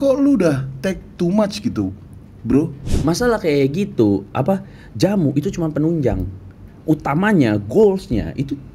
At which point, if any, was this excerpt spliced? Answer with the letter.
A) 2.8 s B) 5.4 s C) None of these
A